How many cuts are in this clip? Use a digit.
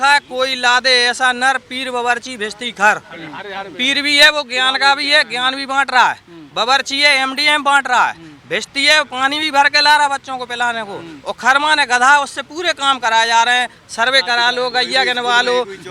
0